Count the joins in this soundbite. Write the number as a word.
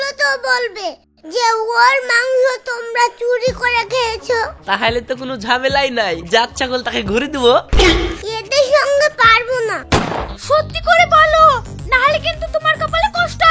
two